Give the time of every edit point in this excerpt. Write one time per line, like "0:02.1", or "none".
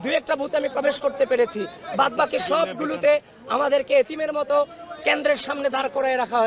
none

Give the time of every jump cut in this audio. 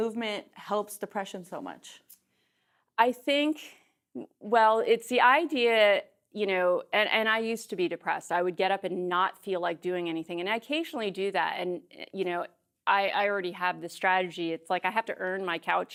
none

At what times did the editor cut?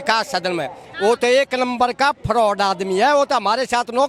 none

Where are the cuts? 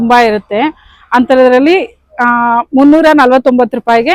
none

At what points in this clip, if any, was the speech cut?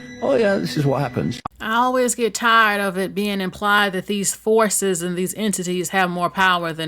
0:01.5

